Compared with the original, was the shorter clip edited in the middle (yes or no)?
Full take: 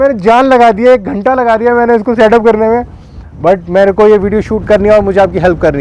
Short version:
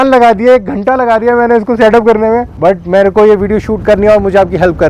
yes